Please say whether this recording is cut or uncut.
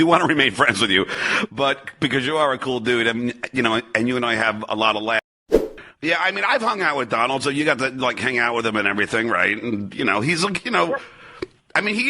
cut